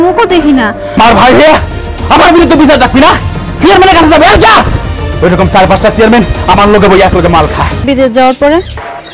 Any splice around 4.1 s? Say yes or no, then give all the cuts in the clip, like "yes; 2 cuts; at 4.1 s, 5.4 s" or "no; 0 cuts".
no; 2 cuts; at 1.0 s, 7.9 s